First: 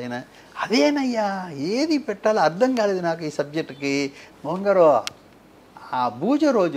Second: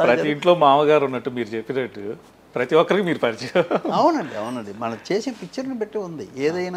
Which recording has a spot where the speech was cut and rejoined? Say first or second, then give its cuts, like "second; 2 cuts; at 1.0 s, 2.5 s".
first; 1 cut; at 4.2 s